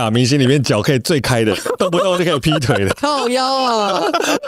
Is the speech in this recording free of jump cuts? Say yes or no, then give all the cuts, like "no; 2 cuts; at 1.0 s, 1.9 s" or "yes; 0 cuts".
yes; 0 cuts